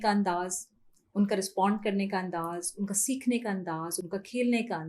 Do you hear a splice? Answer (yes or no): no